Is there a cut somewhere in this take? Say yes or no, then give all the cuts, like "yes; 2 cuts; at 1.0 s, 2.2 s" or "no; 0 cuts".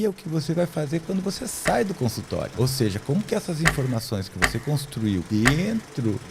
yes; 1 cut; at 2.5 s